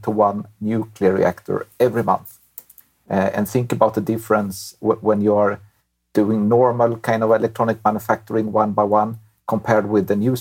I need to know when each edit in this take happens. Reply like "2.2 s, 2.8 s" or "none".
none